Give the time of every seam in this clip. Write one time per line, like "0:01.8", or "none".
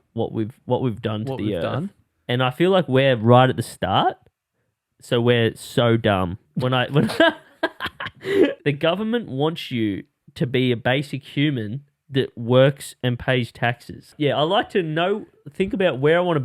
0:02.0
0:06.4
0:08.6
0:14.1

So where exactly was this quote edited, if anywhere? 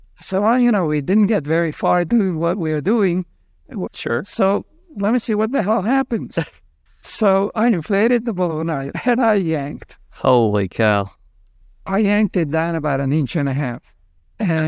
0:02.1
0:03.9
0:08.9

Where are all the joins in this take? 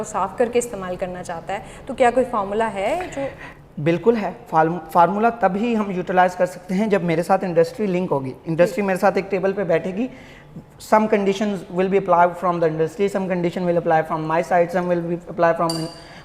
none

